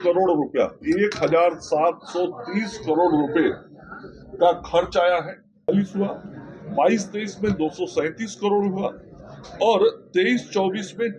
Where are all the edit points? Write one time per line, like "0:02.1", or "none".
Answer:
0:05.7